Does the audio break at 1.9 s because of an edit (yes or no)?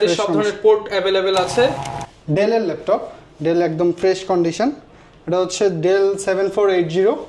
yes